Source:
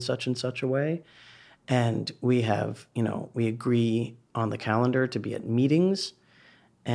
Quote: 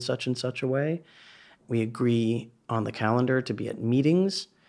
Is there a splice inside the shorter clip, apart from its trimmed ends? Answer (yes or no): yes